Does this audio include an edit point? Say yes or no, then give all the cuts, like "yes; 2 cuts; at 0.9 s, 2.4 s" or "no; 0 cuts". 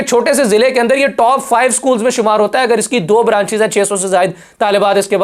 no; 0 cuts